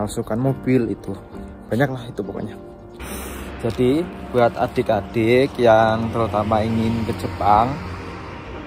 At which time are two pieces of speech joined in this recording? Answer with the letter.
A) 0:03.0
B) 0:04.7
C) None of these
A